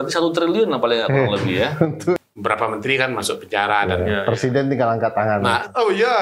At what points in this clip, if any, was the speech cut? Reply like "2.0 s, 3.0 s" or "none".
2.2 s